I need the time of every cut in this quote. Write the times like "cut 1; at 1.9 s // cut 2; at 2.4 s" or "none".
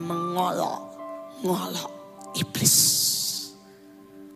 none